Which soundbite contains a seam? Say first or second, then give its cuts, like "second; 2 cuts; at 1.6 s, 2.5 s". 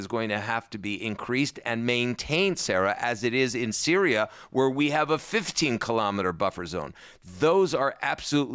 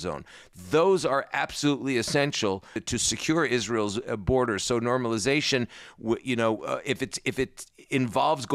second; 1 cut; at 2.8 s